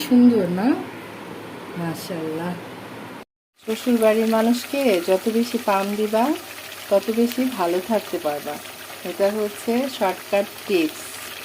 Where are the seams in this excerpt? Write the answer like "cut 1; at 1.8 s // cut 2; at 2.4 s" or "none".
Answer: cut 1; at 3.5 s